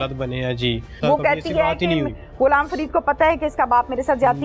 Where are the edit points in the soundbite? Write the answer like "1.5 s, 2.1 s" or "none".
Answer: 0.9 s